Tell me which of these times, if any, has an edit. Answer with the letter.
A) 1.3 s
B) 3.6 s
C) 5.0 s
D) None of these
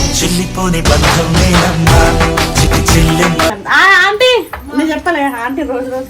B